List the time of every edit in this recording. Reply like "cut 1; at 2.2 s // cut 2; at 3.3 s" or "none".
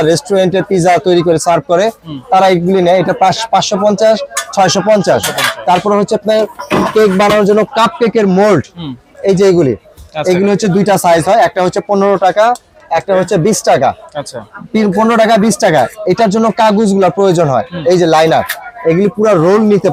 none